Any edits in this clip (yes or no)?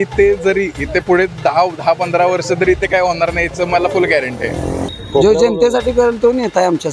yes